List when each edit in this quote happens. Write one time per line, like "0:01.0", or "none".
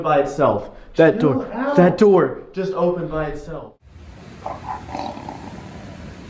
0:03.5